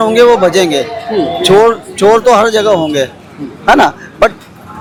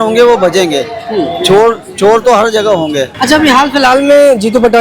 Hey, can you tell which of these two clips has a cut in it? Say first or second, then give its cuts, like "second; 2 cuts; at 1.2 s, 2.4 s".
second; 1 cut; at 3.1 s